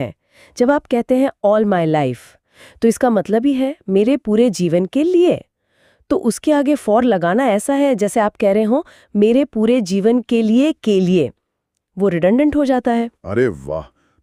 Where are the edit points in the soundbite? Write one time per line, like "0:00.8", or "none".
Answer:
none